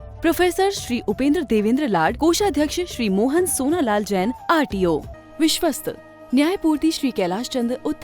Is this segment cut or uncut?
cut